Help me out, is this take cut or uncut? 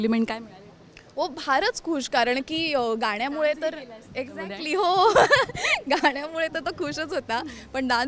uncut